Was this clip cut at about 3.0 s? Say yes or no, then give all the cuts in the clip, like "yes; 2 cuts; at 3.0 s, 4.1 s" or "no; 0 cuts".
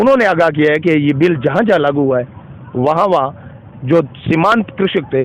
no; 0 cuts